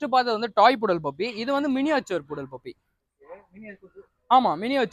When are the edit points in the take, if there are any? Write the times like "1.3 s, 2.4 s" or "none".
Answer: none